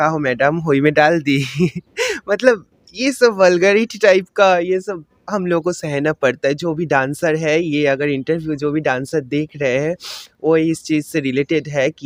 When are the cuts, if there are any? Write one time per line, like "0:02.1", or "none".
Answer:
none